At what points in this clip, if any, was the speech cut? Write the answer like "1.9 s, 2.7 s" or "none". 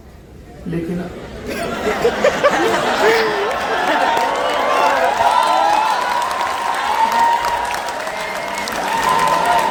none